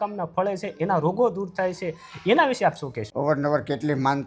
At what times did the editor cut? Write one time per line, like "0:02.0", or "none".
0:03.0

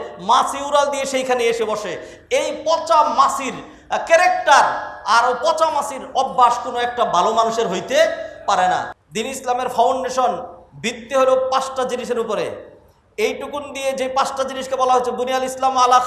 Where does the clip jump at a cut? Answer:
0:09.0

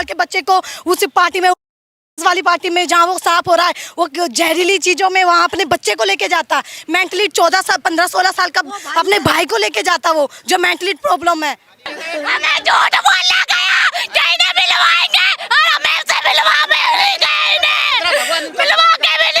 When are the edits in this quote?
0:12.0

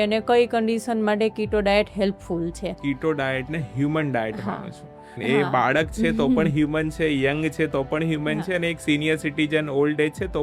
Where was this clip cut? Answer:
0:02.8
0:05.2

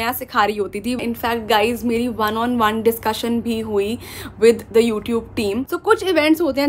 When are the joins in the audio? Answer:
0:01.0
0:05.6

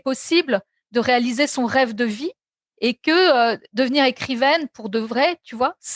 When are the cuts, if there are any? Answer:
none

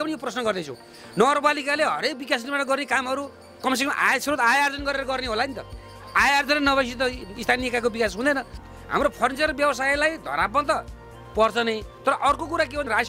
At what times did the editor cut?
0:08.6

